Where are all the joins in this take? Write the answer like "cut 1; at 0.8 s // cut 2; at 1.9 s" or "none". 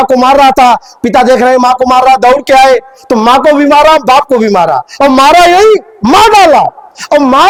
none